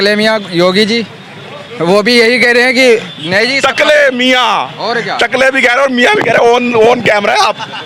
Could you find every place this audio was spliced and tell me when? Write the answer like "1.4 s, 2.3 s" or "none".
none

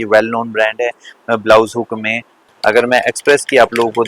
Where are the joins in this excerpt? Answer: 2.4 s

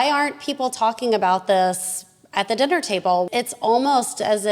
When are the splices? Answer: 3.3 s

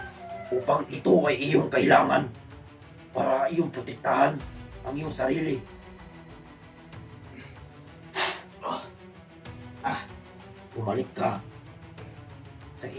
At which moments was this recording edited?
6.3 s, 8.1 s

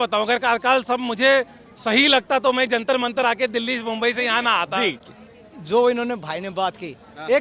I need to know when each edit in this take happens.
none

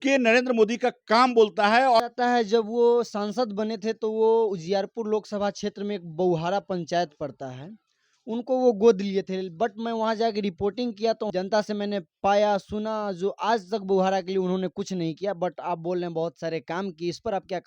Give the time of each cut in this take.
2.0 s, 11.3 s

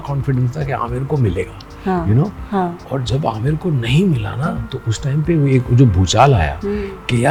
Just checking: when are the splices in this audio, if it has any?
none

